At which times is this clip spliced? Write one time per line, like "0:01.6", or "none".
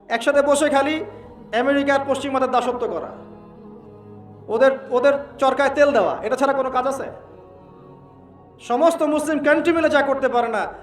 0:07.2
0:08.5